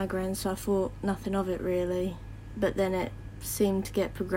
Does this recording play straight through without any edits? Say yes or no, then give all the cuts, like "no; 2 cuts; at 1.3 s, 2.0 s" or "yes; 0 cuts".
yes; 0 cuts